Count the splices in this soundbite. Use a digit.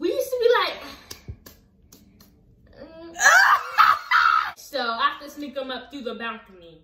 1